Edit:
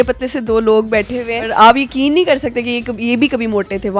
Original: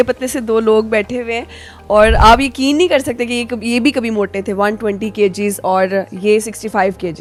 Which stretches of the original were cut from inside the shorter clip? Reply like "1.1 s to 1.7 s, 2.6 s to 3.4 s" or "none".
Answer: 1.5 s to 2.1 s

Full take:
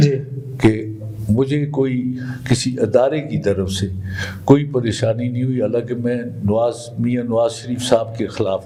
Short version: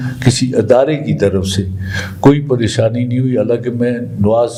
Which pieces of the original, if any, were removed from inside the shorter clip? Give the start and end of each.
none

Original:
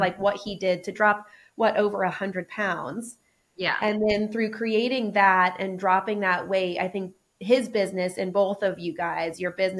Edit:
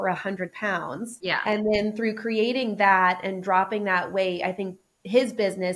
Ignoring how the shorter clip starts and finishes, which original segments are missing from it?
3.1 s to 3.5 s

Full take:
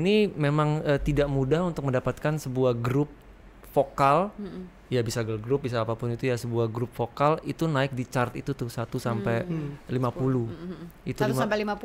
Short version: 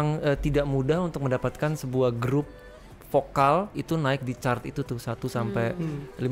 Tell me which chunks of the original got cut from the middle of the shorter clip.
4.4 s to 7.5 s

